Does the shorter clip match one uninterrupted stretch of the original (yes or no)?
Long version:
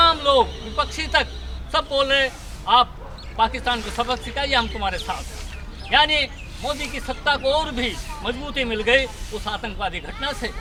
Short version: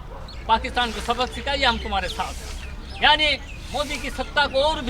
yes